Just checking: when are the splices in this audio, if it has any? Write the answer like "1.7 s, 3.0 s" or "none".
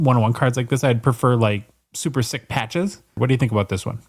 3.1 s